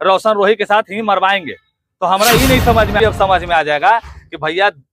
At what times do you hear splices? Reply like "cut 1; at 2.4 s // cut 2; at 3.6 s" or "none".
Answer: cut 1; at 3.0 s